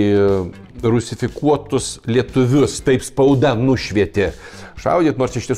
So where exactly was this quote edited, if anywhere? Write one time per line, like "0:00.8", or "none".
none